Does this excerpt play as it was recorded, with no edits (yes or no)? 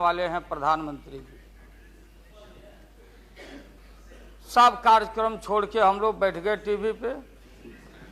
no